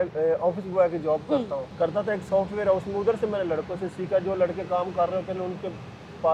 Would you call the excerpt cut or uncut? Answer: cut